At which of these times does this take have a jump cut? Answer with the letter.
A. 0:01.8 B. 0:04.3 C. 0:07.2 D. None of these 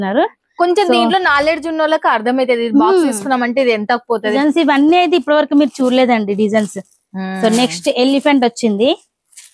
B